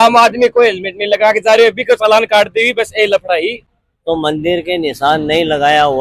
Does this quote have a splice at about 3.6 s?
yes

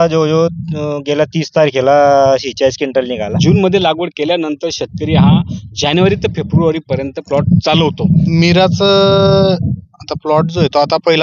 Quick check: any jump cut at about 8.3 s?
yes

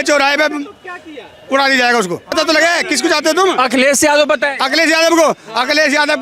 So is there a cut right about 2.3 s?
yes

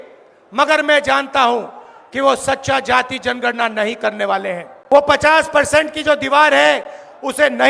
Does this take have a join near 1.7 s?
no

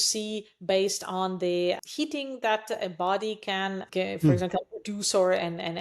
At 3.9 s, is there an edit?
yes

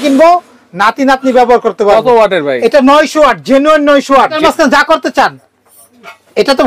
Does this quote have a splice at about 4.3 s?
yes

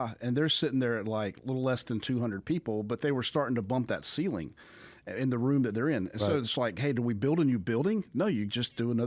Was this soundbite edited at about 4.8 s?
no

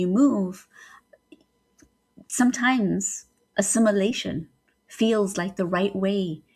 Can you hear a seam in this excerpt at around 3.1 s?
no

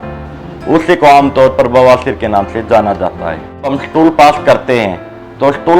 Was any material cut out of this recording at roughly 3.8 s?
yes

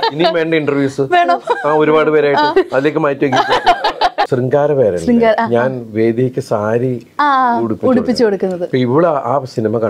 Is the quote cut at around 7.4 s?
no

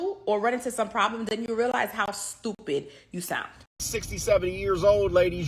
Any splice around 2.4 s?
no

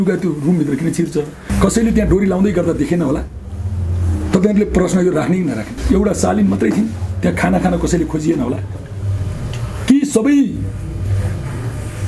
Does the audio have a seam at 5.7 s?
yes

